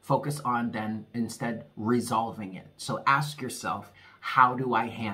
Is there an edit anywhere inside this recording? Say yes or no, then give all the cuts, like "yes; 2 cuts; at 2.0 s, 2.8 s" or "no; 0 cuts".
yes; 1 cut; at 3.9 s